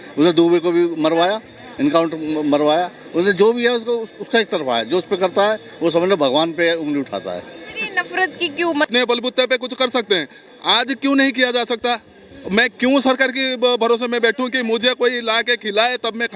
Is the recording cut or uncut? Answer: cut